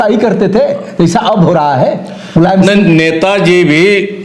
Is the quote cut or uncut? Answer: uncut